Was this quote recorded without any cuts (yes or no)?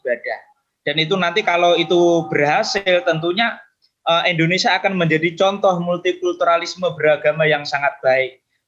yes